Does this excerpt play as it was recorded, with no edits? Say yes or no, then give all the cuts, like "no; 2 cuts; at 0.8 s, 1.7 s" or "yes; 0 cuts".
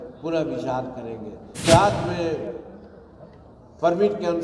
no; 1 cut; at 1.6 s